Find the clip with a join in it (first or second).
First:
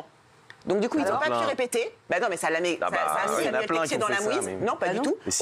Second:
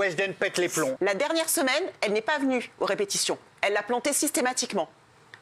second